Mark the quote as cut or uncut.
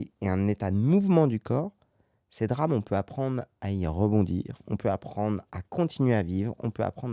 uncut